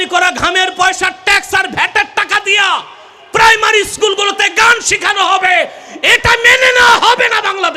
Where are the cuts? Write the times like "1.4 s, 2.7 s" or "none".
none